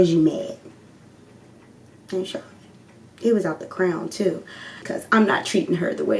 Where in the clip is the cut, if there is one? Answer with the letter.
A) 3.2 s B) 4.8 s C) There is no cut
B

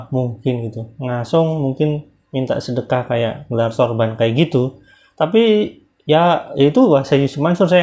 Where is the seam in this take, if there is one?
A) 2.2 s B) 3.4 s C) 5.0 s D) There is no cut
D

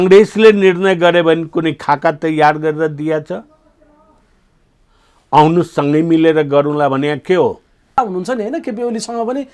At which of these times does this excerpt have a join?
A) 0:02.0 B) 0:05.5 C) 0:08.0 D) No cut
C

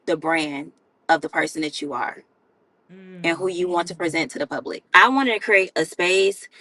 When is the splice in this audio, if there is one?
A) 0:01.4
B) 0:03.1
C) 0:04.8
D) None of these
C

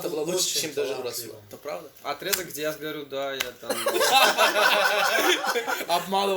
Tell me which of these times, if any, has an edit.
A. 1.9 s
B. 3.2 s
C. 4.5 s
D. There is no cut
A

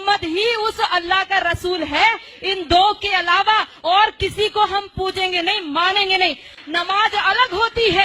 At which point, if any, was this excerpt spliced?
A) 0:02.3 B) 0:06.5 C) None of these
B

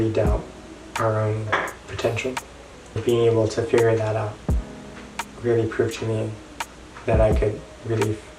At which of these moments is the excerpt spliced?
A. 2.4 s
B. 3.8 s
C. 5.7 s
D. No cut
D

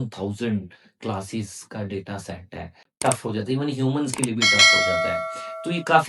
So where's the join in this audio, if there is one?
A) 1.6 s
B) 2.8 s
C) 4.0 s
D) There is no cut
B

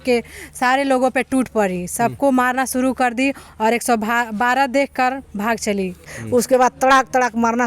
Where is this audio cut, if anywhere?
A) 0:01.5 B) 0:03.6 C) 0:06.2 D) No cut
C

